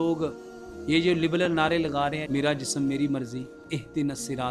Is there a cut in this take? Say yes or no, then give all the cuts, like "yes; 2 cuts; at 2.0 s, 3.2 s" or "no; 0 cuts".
yes; 2 cuts; at 2.2 s, 3.7 s